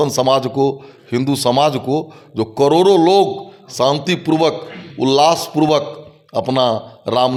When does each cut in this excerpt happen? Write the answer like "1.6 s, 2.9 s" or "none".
none